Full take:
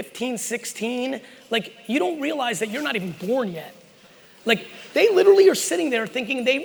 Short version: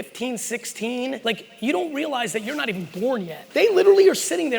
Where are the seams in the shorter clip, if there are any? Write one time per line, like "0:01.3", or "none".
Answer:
0:01.2
0:03.4